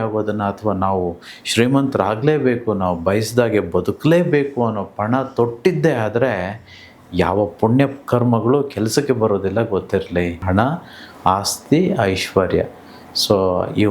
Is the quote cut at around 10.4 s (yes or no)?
yes